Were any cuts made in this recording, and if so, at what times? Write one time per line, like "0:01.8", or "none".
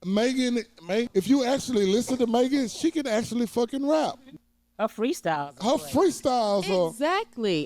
0:01.1
0:04.3